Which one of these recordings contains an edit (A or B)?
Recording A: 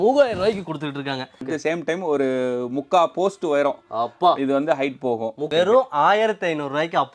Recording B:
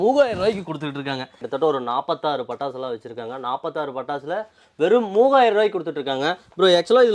A